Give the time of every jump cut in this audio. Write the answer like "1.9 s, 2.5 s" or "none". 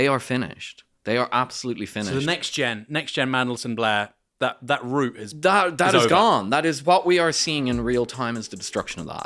none

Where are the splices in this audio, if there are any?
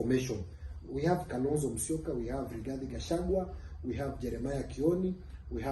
none

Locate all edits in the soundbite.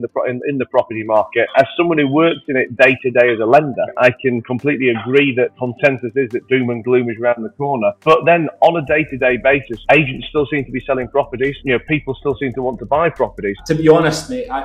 1.5 s, 3.9 s, 5.6 s, 13.6 s

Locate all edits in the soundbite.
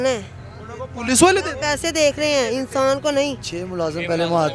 3.5 s

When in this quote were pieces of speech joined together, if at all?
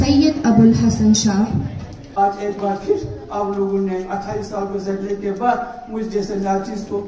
2.0 s

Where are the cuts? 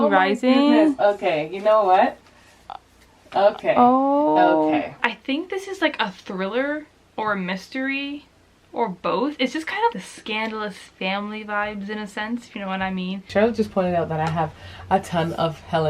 5.1 s, 9.9 s, 13.3 s

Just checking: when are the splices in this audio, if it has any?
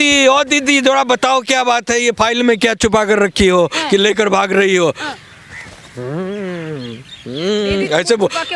none

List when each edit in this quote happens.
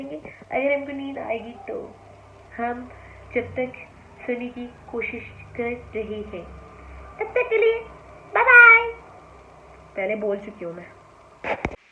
none

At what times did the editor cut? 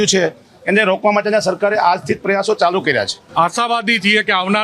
3.2 s

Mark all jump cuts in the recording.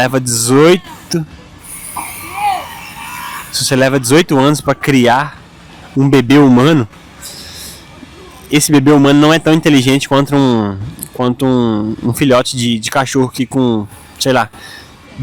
none

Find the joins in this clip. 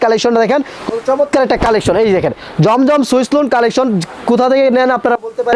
none

